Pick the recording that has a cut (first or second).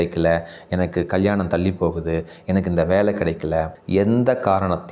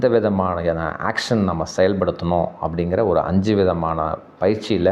first